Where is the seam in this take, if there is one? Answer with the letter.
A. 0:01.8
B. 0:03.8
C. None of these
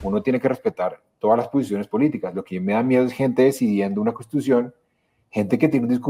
C